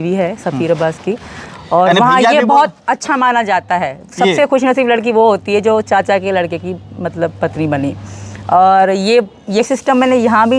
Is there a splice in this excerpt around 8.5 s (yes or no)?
no